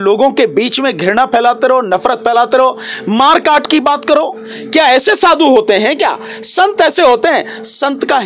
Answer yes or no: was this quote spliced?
no